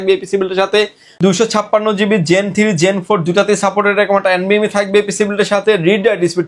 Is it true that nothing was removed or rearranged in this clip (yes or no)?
no